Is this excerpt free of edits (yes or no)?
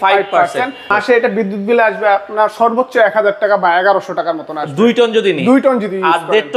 no